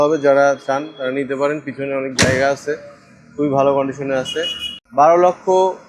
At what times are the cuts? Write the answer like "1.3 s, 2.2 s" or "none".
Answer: 4.7 s